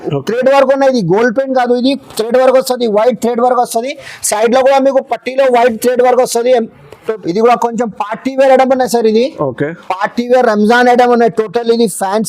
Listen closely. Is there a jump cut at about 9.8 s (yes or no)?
no